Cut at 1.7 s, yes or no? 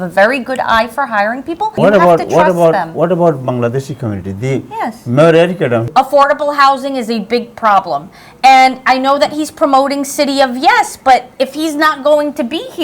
yes